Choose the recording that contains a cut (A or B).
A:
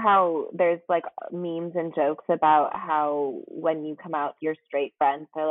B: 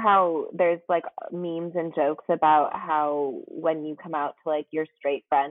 A